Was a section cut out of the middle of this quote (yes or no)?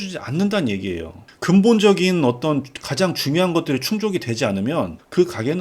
yes